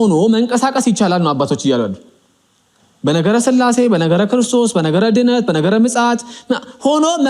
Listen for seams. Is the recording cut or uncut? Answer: uncut